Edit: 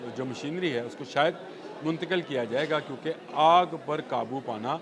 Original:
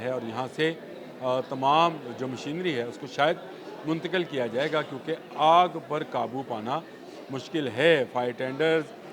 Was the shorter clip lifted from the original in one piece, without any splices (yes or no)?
yes